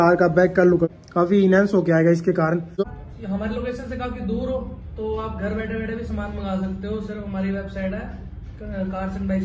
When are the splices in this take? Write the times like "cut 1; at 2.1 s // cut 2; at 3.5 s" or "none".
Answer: cut 1; at 2.8 s